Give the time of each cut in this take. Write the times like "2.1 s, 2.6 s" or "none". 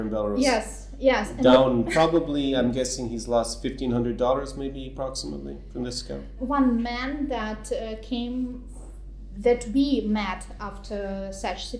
6.3 s